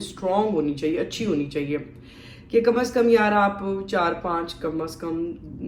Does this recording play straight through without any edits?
yes; 0 cuts

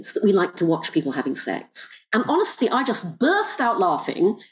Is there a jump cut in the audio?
no; 0 cuts

